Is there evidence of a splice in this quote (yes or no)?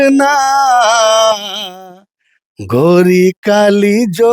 no